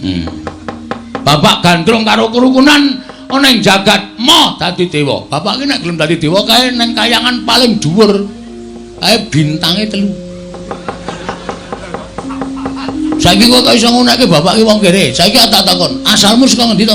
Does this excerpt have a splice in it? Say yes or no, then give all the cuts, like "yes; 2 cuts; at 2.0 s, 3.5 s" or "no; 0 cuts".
no; 0 cuts